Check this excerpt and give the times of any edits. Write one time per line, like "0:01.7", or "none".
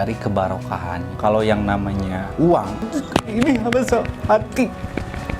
0:01.1
0:02.8